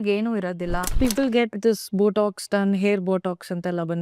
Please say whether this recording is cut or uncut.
cut